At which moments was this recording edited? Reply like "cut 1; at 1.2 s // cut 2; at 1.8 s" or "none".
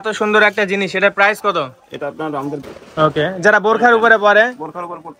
cut 1; at 2.7 s